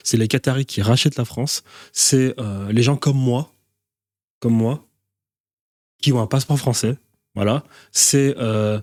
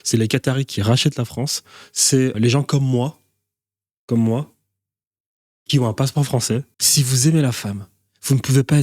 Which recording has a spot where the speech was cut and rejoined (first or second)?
second